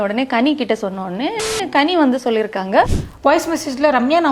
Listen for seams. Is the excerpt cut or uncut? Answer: cut